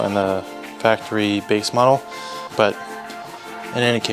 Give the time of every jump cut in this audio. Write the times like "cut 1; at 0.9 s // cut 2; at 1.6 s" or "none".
cut 1; at 2.4 s